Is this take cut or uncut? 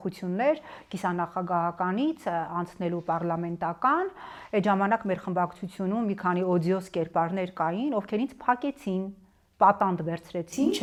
uncut